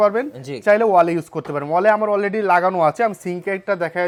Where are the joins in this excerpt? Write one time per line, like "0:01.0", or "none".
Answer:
none